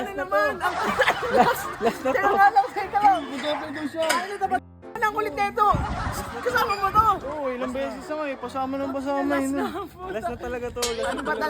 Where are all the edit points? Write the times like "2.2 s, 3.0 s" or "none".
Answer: 4.8 s